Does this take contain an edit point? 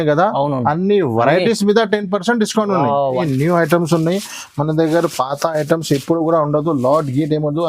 yes; 1 cut; at 3.1 s

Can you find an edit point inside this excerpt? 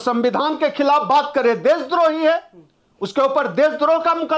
no; 0 cuts

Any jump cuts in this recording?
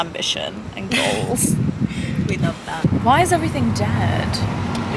no; 0 cuts

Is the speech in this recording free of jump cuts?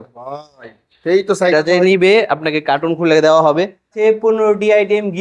no; 1 cut; at 4.0 s

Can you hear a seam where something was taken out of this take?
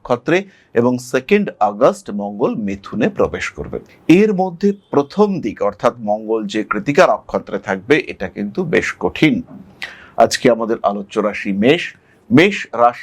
no; 0 cuts

